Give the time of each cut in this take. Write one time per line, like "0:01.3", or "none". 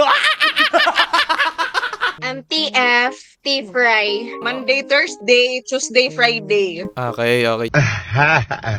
0:02.2

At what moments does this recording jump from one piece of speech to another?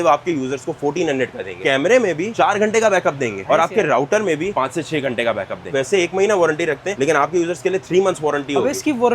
0:01.6
0:05.7

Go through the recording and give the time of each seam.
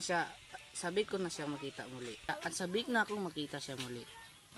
0:02.3

